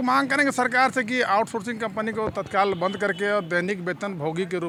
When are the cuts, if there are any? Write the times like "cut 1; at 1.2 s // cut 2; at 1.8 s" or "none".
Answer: none